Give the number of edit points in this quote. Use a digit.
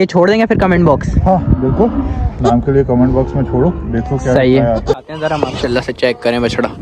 1